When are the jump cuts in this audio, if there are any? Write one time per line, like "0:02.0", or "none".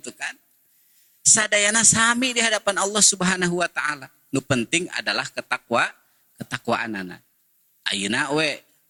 none